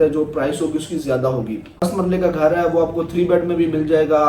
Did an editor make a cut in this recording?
yes; 1 cut; at 1.8 s

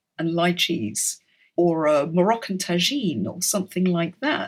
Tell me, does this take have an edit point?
no; 0 cuts

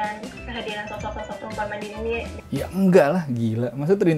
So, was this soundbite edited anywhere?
yes; 1 cut; at 2.4 s

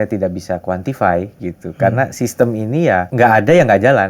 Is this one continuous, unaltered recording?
no; 1 cut; at 3.1 s

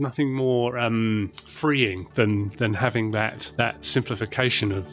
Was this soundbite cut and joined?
no; 0 cuts

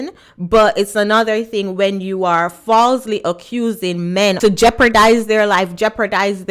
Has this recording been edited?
yes; 1 cut; at 4.4 s

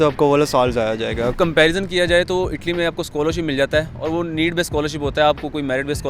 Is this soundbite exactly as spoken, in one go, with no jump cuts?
no; 1 cut; at 1.3 s

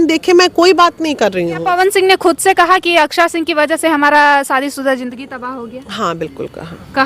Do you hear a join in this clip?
yes; 1 cut; at 1.6 s

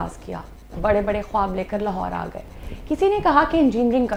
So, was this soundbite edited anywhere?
no; 0 cuts

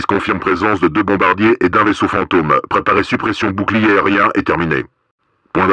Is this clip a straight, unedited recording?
yes; 0 cuts

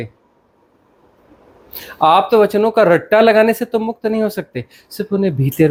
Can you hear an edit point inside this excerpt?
no; 0 cuts

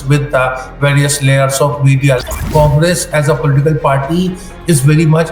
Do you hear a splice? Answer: yes; 1 cut; at 2.4 s

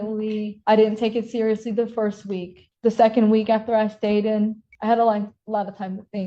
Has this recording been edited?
no; 0 cuts

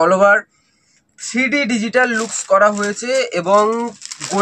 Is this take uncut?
yes; 0 cuts

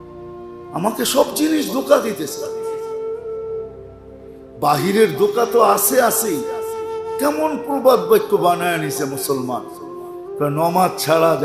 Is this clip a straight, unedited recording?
no; 2 cuts; at 2.3 s, 4.0 s

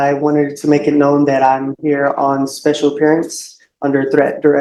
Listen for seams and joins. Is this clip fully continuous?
yes; 0 cuts

